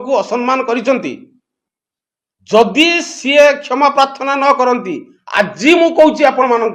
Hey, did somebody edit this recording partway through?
no; 0 cuts

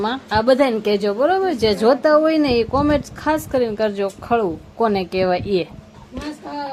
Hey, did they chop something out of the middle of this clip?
no; 0 cuts

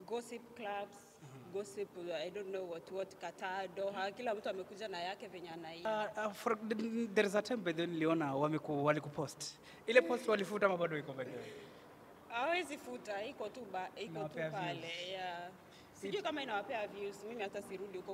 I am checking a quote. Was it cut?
yes; 1 cut; at 5.9 s

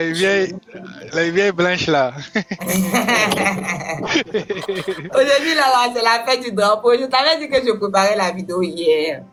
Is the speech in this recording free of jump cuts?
yes; 0 cuts

